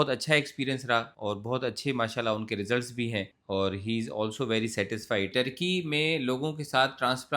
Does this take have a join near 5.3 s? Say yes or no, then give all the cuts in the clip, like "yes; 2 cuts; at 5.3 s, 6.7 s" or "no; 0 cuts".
yes; 2 cuts; at 1.1 s, 5.3 s